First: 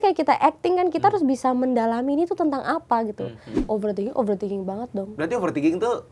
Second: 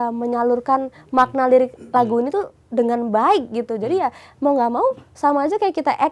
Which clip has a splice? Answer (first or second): first